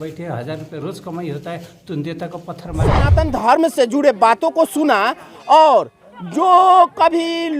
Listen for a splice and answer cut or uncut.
cut